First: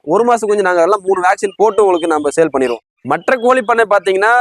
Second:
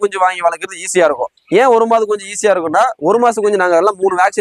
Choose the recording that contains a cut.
first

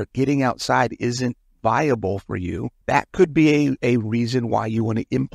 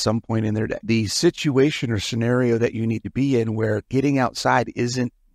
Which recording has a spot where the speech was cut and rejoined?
first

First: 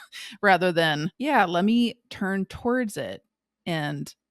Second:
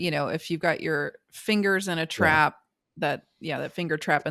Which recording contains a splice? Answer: first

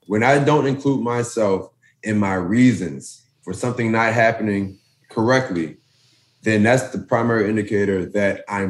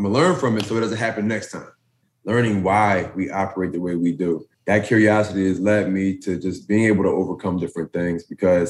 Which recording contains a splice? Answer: second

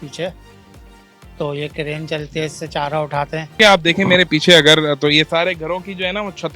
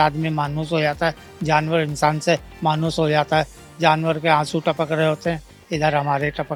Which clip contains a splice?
first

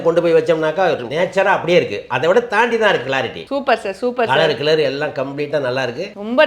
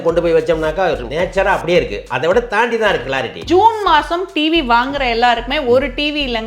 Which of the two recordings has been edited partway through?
second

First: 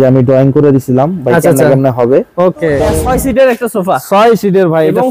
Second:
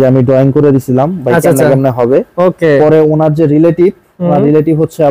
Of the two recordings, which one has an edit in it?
first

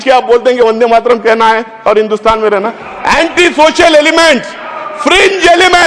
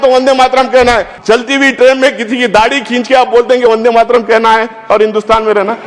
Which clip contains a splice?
second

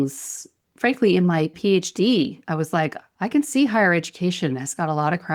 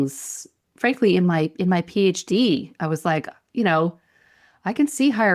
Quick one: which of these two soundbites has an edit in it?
first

